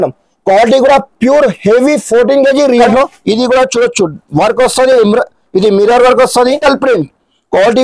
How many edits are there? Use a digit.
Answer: 2